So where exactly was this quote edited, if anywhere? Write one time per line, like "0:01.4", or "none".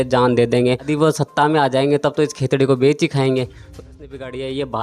0:00.9
0:03.8

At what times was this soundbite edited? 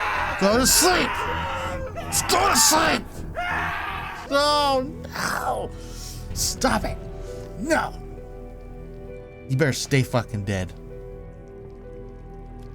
0:04.2

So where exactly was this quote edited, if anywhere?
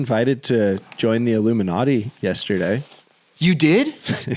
none

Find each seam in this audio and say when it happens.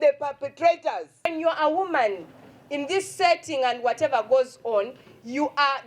0:01.2

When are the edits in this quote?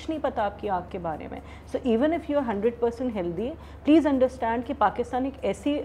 none

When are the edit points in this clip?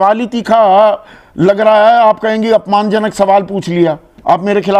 none

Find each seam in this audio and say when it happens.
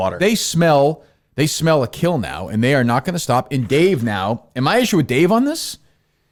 none

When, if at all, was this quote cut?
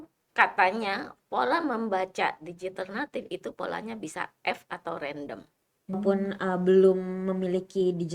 0:06.2

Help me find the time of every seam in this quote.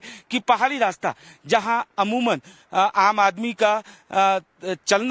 0:03.5

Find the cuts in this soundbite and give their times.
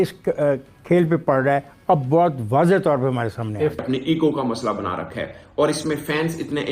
0:03.8

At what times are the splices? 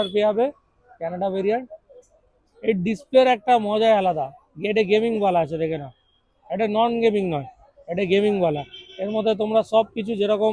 none

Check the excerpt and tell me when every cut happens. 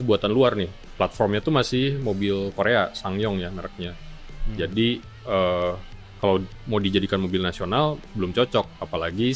none

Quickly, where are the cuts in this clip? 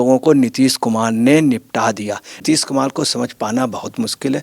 0:02.4

